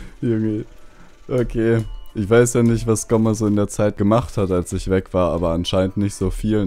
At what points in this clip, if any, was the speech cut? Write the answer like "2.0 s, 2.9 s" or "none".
4.0 s